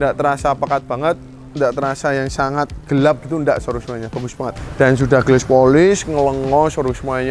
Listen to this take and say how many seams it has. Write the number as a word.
one